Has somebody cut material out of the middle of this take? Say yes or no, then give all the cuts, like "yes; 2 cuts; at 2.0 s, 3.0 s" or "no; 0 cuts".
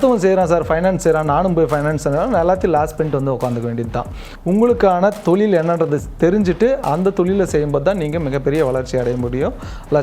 yes; 1 cut; at 4.3 s